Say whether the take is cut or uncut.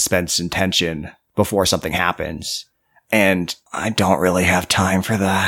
cut